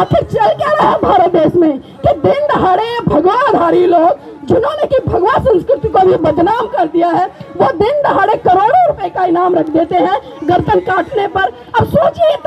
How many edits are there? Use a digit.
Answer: 0